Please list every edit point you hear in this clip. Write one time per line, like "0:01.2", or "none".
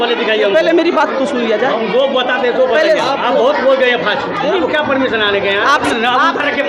0:04.5
0:05.9